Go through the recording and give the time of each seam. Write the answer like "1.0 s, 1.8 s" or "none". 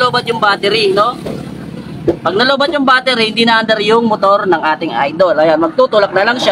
none